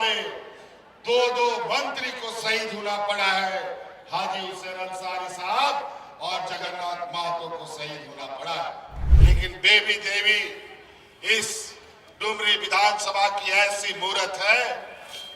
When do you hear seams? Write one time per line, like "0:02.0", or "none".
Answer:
0:09.0